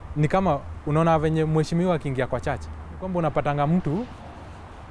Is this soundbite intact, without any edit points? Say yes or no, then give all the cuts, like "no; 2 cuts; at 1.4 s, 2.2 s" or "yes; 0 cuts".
no; 1 cut; at 3.1 s